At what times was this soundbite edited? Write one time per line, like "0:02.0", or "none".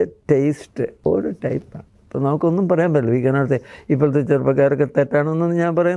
0:00.9